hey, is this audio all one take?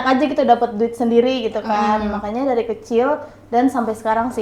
yes; 0 cuts

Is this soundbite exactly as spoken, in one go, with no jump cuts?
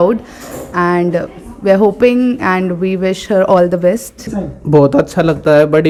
yes; 0 cuts

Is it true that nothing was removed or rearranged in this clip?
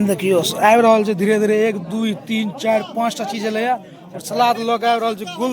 yes; 0 cuts

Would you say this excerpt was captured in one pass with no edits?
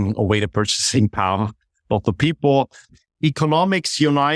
no; 1 cut; at 2.8 s

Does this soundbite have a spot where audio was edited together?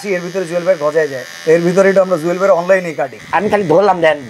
yes; 2 cuts; at 1.3 s, 3.1 s

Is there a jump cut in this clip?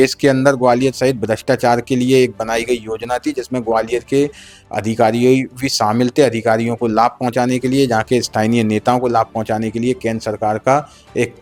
no; 0 cuts

